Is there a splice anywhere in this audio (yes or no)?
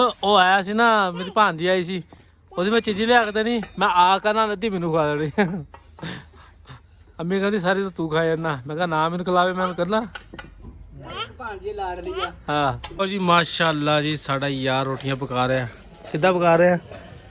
yes